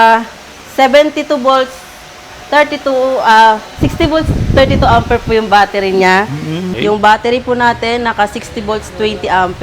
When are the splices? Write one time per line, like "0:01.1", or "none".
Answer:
0:06.6